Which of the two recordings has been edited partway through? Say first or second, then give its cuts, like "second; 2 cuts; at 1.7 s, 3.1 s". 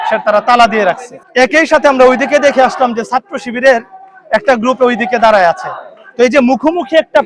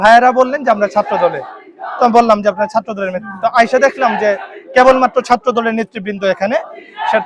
first; 1 cut; at 1.1 s